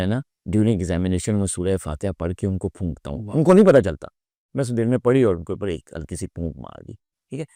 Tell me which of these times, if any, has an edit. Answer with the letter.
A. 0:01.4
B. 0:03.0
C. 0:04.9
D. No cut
D